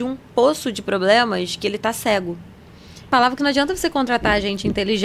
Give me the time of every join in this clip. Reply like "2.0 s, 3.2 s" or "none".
3.1 s